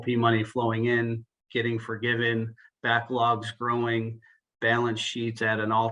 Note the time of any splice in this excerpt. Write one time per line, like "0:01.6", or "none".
none